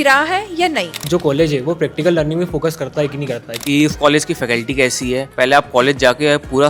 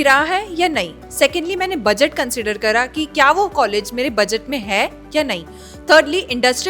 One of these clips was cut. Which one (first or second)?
first